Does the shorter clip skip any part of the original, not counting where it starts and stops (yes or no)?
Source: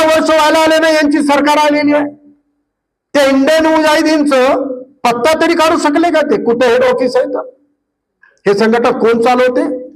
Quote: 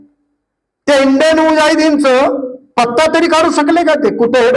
no